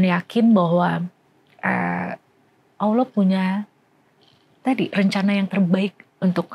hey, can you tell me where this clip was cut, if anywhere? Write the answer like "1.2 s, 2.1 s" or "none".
none